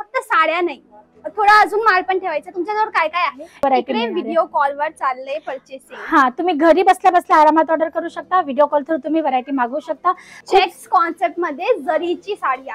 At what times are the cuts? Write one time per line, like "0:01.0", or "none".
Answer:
0:03.6
0:10.3